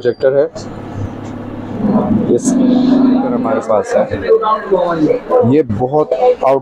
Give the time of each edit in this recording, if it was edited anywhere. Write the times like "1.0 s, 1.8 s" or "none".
3.4 s